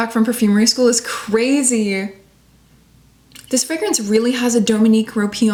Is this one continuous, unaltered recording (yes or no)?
yes